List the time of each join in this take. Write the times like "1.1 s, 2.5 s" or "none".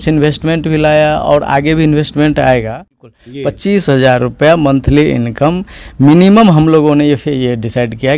3.2 s